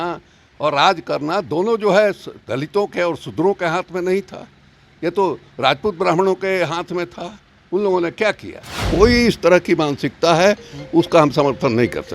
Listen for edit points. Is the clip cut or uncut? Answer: cut